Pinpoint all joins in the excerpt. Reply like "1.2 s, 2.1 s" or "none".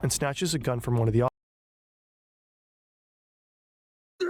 none